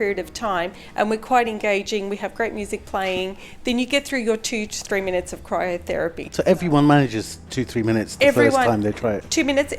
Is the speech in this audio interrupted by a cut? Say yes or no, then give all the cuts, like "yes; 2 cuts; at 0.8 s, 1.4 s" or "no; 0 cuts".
no; 0 cuts